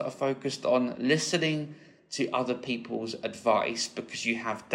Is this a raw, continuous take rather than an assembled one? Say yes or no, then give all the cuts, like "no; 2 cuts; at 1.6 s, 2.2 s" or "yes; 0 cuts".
yes; 0 cuts